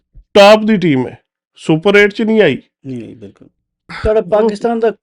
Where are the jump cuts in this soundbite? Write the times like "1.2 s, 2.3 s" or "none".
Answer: 3.9 s